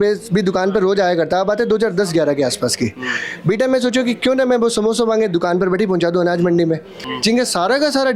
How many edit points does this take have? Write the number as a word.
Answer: one